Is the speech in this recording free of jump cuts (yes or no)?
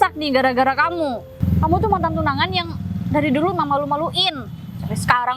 no